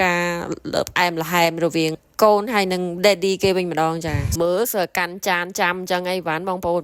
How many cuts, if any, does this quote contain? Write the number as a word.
one